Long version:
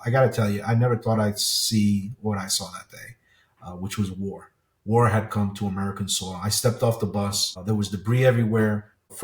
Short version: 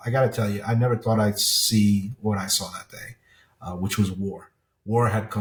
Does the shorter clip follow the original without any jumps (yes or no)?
yes